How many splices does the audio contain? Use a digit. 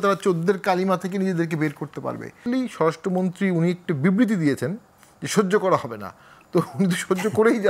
1